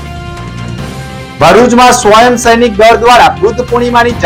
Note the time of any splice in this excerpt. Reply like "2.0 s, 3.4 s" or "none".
none

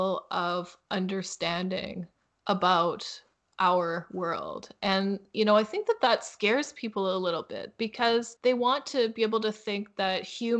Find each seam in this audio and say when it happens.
8.3 s

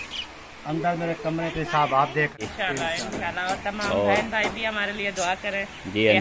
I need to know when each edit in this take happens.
2.4 s

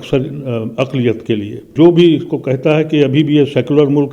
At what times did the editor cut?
1.7 s

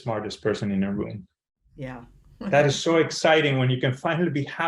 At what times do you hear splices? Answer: none

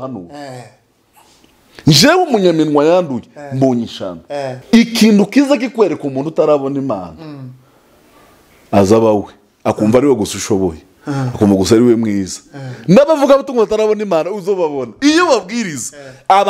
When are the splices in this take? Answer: 4.6 s

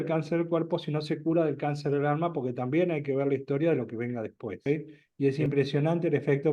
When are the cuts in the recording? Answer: 4.7 s

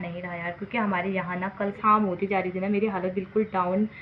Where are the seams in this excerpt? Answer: 1.8 s

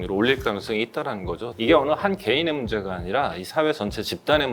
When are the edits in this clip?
1.5 s

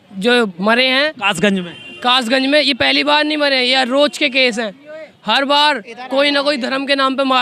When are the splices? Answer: none

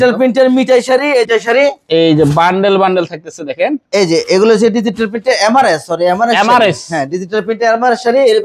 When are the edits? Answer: 1.3 s

